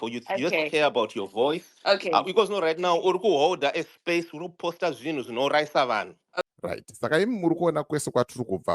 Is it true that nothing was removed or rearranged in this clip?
no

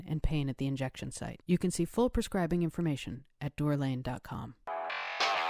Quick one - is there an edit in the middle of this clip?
yes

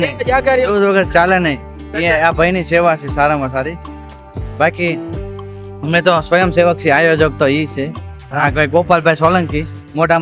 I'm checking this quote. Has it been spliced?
no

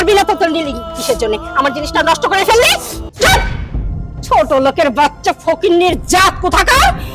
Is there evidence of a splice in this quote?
yes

